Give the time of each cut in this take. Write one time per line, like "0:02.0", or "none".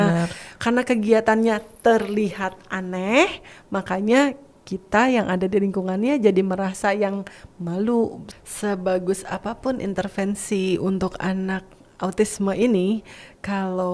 0:08.3